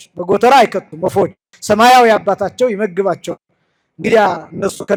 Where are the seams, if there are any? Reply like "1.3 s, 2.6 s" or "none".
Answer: none